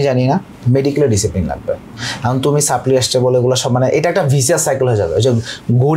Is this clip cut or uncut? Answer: uncut